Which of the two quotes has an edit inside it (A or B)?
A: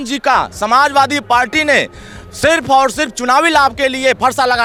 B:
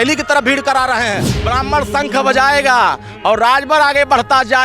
B